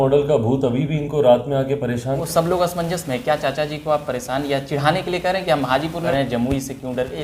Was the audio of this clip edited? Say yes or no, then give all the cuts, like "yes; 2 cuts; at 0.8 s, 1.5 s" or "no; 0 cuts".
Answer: yes; 2 cuts; at 2.2 s, 6.1 s